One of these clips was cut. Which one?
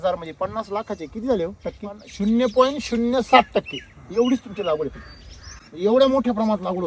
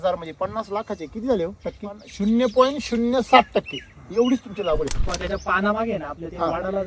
second; 1 cut; at 5.1 s

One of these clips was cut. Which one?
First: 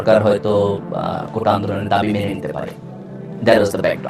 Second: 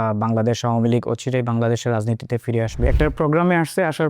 second; 1 cut; at 2.8 s

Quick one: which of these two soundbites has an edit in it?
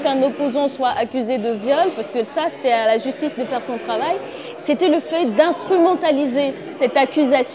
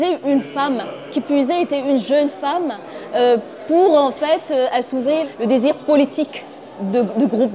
first; 1 cut; at 6.6 s

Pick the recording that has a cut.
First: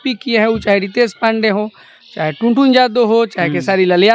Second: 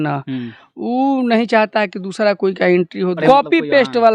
second; 1 cut; at 3.2 s

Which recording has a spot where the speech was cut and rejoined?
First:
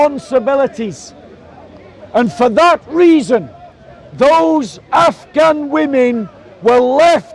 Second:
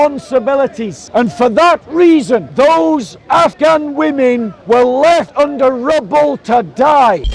second; 5 cuts; at 0.9 s, 2.5 s, 3.5 s, 4.5 s, 5.3 s

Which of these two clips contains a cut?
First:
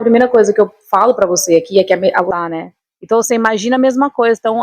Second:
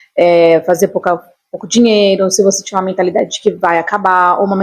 first; 1 cut; at 2.3 s

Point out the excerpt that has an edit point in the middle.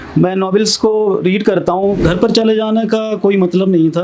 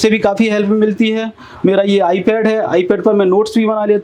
first; 1 cut; at 2.0 s

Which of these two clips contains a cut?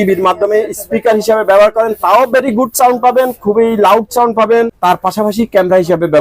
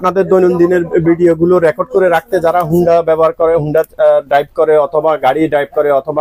first; 1 cut; at 4.8 s

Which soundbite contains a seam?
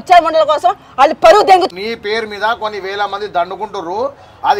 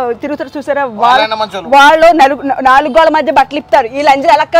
first; 1 cut; at 1.7 s

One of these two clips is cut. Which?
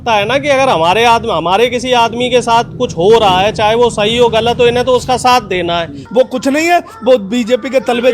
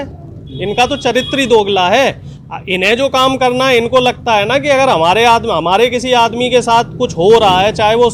first; 1 cut; at 6.0 s

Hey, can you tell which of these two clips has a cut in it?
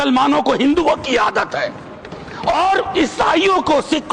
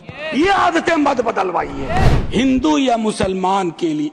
second; 1 cut; at 2.2 s

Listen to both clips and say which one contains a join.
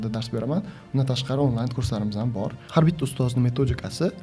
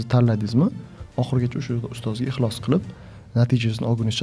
first; 1 cut; at 2.6 s

